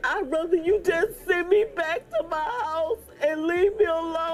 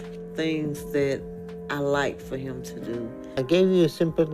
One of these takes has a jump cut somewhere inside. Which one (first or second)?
second